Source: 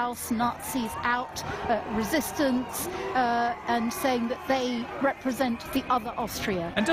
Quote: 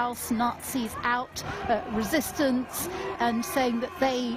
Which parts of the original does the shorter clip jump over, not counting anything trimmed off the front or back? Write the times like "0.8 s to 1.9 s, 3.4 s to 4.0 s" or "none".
3.1 s to 3.6 s